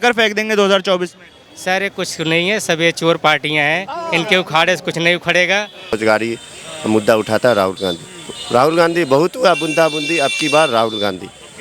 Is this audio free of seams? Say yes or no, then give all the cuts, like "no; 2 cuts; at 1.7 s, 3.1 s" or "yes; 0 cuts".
no; 1 cut; at 6.0 s